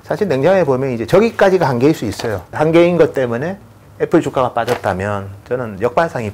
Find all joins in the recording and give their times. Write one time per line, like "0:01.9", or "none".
none